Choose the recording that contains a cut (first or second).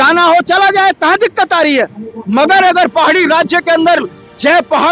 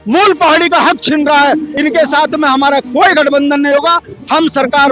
second